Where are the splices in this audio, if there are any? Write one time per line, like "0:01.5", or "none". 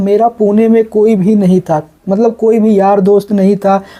none